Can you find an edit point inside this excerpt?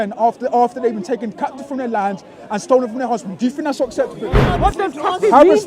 yes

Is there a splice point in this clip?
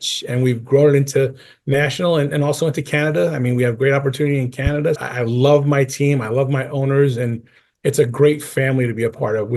yes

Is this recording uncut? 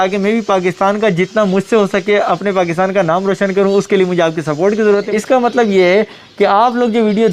no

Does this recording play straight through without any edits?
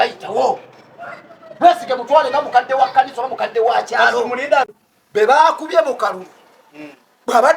no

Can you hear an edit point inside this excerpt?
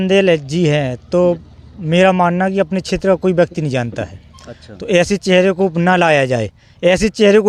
no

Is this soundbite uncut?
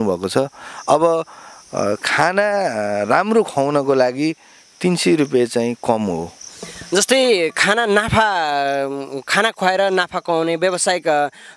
yes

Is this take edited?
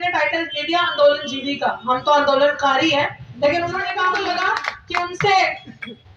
yes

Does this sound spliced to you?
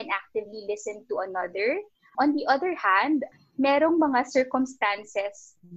yes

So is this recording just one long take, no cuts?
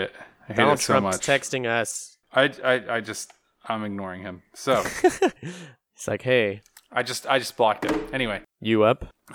no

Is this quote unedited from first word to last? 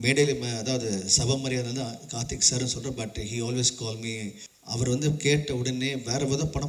no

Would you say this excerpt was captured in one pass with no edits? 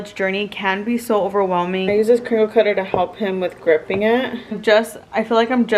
no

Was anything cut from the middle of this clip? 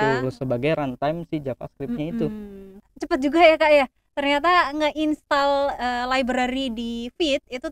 yes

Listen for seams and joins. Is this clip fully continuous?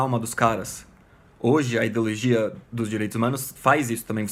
yes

